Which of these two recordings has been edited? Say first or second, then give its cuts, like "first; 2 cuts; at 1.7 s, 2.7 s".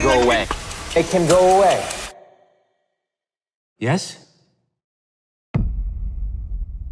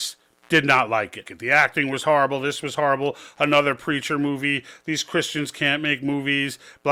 second; 1 cut; at 1.3 s